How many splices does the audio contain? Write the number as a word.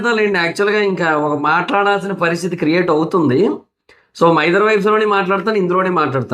zero